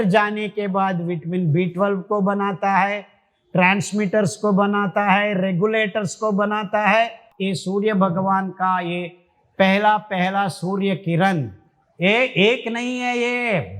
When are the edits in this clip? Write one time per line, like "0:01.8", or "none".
0:07.3